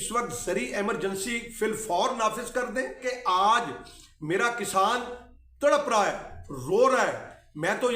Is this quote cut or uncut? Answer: cut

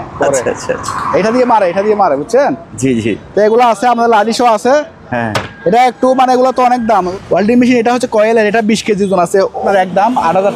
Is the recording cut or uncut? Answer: cut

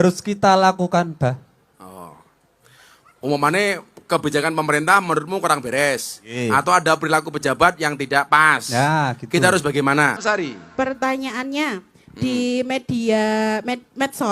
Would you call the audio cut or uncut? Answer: cut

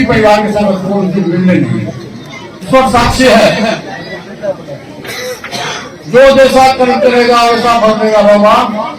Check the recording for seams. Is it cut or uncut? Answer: cut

